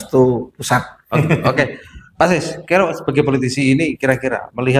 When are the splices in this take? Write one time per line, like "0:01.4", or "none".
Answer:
none